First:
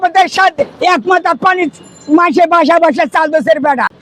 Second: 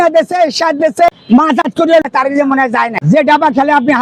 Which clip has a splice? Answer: second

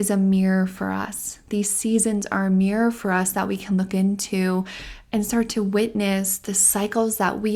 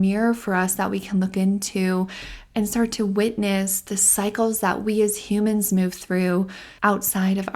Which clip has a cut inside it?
second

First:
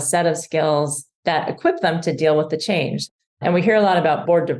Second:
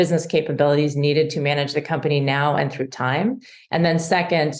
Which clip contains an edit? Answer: first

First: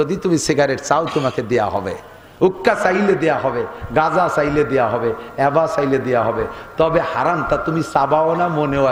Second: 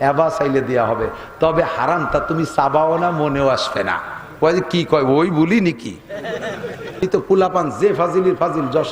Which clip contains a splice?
second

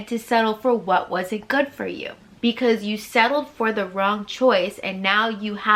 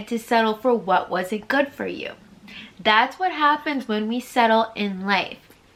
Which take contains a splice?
first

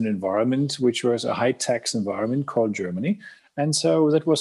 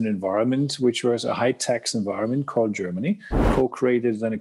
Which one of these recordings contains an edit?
second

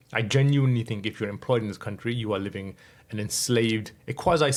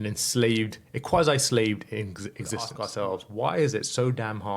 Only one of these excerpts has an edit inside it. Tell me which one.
second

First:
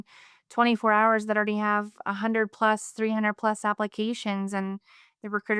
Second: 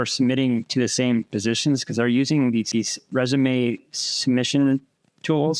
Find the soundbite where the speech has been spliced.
second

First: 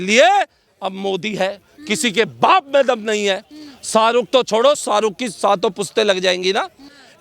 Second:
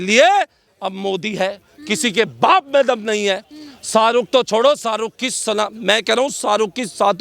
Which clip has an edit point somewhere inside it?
first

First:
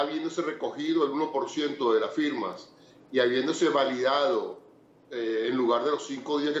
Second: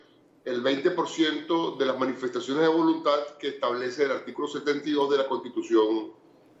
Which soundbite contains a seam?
first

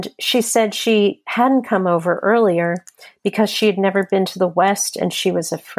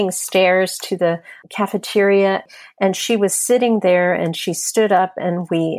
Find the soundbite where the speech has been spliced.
second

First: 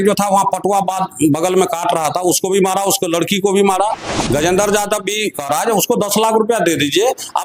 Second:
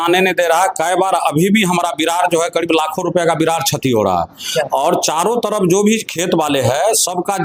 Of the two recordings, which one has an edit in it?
first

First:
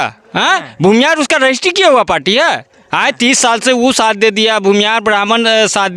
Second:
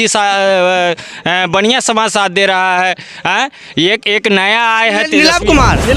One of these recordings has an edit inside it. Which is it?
second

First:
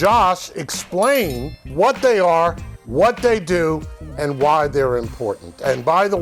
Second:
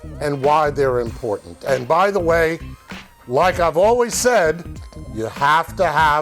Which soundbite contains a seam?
first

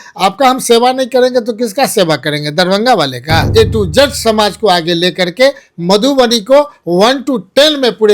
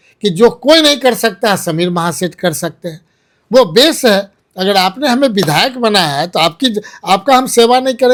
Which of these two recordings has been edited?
first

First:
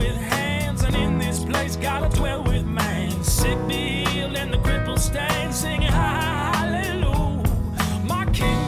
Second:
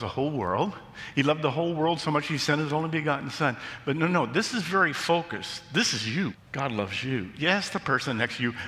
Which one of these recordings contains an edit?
second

